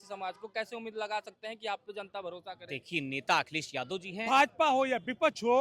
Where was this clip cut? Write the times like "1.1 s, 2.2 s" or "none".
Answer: 4.2 s

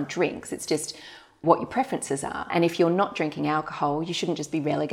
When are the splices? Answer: 1.4 s, 2.5 s

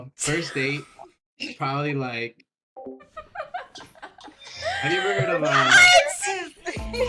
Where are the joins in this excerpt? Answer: none

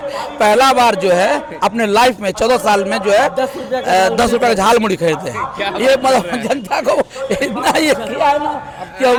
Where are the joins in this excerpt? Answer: none

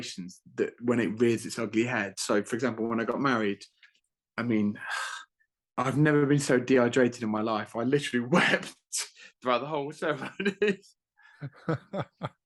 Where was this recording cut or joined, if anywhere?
none

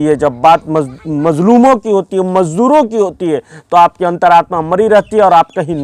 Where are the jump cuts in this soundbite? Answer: none

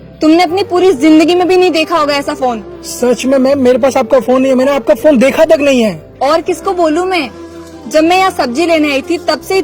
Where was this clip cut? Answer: none

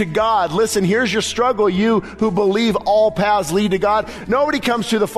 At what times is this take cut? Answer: 4.2 s

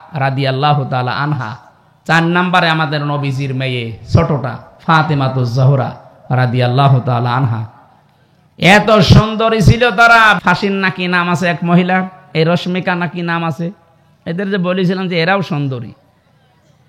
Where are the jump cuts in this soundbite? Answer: 10.4 s

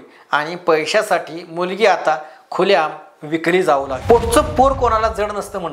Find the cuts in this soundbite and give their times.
3.9 s

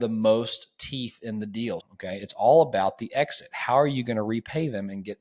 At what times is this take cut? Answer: 1.8 s

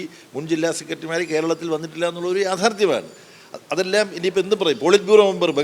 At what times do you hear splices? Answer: none

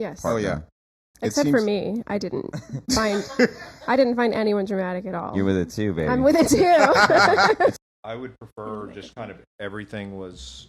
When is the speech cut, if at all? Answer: 7.7 s

